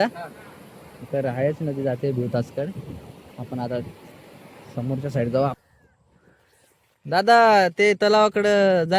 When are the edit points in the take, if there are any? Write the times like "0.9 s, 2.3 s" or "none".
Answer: 5.6 s